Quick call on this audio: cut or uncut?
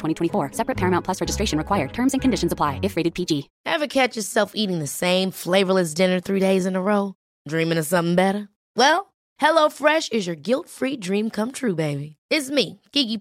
cut